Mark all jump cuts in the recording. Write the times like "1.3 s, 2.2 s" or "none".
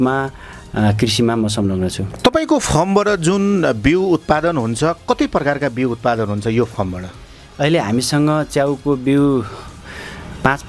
2.1 s